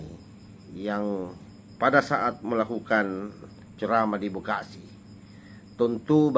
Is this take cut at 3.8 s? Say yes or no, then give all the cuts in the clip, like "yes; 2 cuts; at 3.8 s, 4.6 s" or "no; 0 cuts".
no; 0 cuts